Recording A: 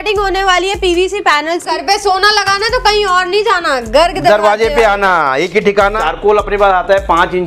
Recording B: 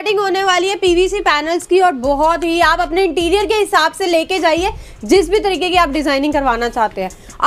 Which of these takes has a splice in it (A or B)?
A